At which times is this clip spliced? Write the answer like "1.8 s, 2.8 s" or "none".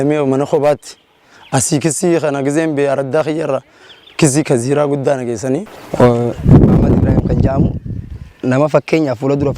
5.8 s